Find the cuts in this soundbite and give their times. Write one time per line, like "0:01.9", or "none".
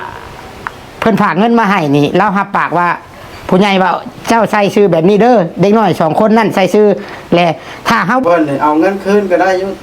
0:08.2